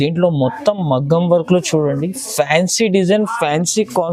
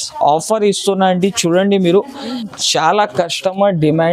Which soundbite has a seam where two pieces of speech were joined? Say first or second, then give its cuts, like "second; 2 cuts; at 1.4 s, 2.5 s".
second; 1 cut; at 2.4 s